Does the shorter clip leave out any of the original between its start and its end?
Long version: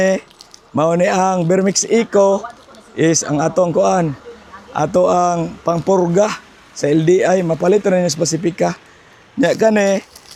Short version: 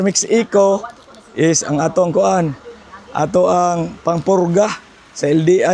no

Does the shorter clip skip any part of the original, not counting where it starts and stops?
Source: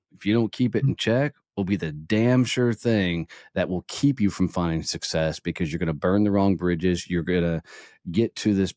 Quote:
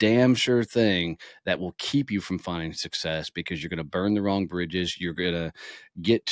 no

